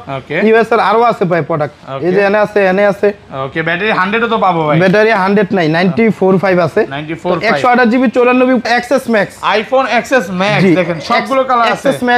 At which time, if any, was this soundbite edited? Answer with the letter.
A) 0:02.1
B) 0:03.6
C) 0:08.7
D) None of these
C